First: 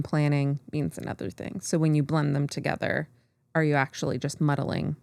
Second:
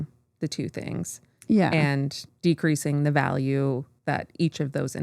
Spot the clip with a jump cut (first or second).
second